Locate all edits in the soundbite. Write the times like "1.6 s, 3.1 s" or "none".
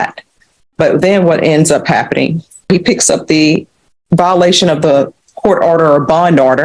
2.7 s